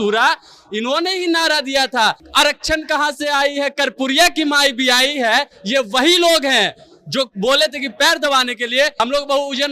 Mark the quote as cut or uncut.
cut